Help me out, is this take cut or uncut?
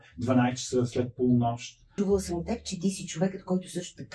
cut